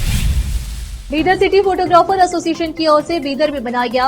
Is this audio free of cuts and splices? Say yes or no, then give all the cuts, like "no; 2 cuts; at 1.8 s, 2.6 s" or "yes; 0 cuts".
no; 1 cut; at 1.0 s